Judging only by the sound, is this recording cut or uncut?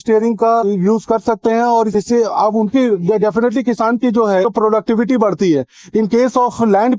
uncut